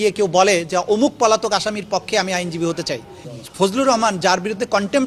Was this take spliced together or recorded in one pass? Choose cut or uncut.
cut